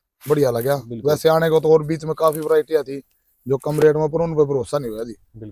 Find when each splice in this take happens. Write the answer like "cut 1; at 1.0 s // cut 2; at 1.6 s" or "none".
none